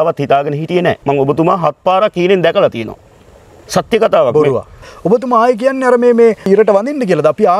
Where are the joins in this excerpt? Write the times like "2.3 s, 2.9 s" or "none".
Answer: 1.0 s, 4.9 s, 6.5 s